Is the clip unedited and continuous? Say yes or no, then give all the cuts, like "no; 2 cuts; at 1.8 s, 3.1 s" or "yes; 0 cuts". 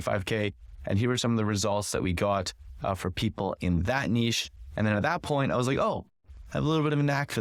yes; 0 cuts